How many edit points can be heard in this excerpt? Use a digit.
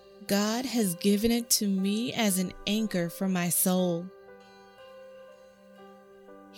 0